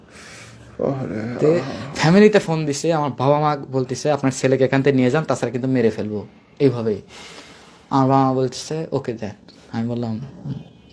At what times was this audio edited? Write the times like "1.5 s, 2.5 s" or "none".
1.8 s